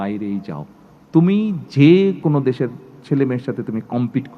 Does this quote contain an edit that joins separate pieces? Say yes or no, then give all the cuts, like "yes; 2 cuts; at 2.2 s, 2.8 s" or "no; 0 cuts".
yes; 1 cut; at 2.2 s